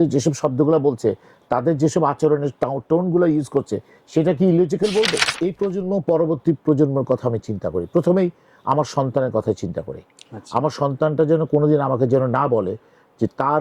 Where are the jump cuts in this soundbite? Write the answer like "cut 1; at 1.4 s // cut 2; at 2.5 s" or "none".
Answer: cut 1; at 5.3 s